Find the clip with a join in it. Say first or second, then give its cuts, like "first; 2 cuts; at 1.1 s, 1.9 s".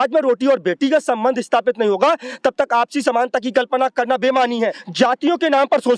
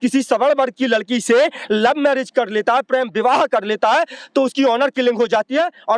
first; 1 cut; at 4.8 s